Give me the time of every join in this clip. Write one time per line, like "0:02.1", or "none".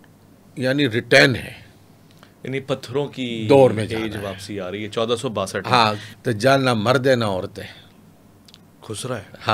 0:06.1